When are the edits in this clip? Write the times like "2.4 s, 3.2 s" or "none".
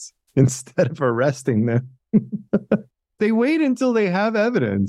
3.1 s